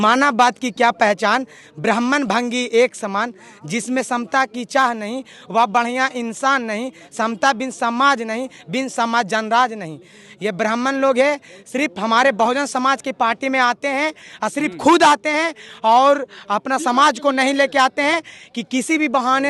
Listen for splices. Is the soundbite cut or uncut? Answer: uncut